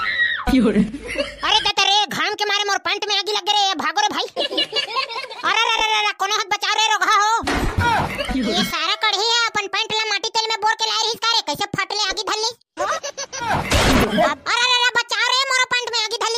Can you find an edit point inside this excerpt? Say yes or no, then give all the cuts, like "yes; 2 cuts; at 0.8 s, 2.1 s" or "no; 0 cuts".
yes; 2 cuts; at 13.5 s, 14.4 s